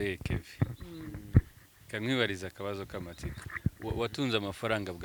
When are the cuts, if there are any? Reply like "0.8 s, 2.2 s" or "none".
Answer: none